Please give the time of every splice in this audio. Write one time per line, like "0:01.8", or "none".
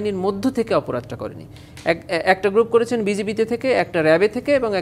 none

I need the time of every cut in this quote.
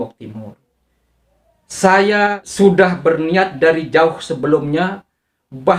0:01.1
0:02.4

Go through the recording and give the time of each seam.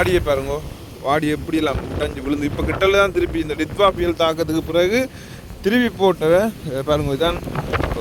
none

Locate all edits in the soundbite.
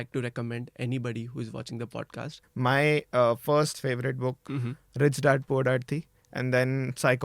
0:02.4
0:04.4

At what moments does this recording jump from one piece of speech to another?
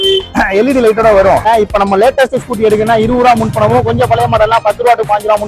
0:01.4

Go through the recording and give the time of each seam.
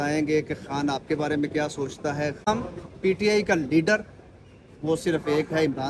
0:02.5

